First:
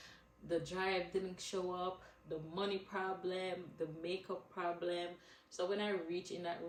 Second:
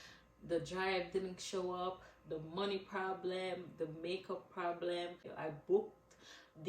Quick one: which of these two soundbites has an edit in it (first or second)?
second